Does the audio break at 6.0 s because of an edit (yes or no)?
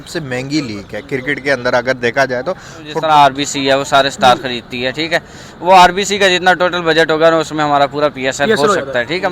no